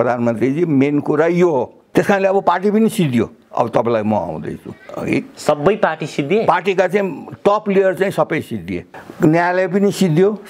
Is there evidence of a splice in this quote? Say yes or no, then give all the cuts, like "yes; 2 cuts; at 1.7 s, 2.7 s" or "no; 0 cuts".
yes; 2 cuts; at 1.8 s, 8.8 s